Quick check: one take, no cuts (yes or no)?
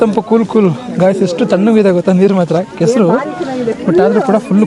yes